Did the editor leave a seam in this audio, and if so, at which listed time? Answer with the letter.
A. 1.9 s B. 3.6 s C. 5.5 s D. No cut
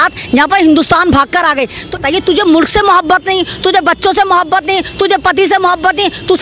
A